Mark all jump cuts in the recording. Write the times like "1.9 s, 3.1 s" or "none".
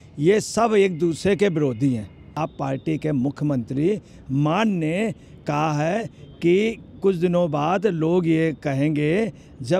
2.4 s